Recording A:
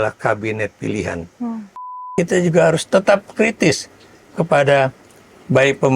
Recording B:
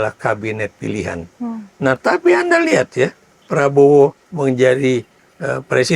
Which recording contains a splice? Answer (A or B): A